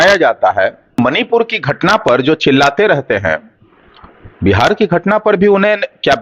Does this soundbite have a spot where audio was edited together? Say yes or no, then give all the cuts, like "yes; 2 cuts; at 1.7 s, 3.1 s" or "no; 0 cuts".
yes; 1 cut; at 1.0 s